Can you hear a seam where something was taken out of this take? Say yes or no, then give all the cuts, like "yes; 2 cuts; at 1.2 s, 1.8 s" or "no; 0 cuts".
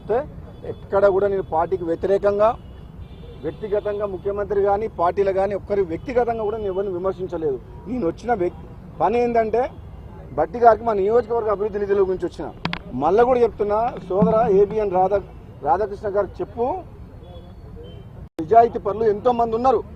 yes; 1 cut; at 18.4 s